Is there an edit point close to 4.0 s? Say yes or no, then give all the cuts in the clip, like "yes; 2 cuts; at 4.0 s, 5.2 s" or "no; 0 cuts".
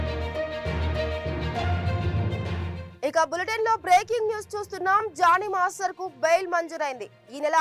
no; 1 cut; at 2.8 s